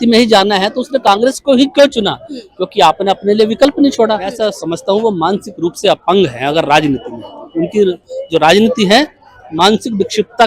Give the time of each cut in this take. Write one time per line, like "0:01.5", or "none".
0:04.4

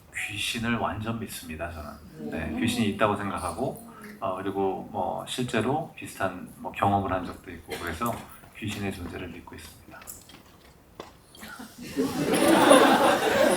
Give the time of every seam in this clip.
none

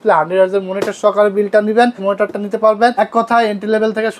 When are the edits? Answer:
0:02.0
0:02.9

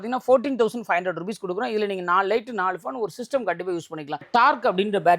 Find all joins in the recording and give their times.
0:04.2

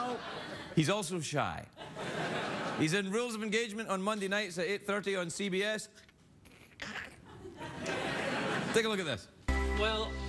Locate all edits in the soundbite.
0:09.0

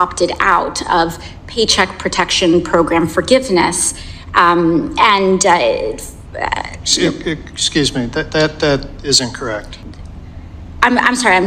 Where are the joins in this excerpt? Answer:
0:09.7

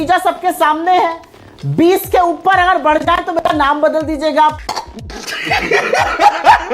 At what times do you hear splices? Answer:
none

